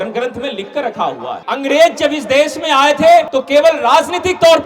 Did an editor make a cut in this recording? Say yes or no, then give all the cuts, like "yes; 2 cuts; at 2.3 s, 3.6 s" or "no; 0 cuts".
yes; 2 cuts; at 1.4 s, 3.4 s